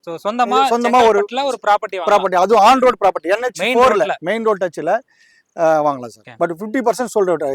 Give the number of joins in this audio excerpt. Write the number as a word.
one